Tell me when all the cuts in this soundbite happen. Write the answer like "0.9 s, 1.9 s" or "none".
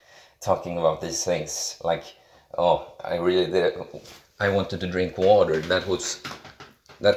none